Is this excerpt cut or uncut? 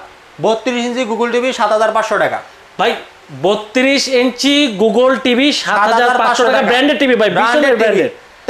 uncut